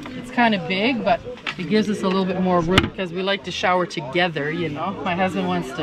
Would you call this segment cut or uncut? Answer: cut